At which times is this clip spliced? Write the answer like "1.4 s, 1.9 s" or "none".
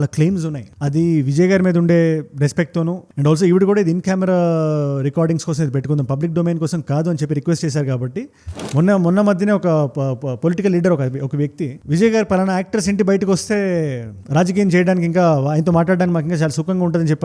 8.6 s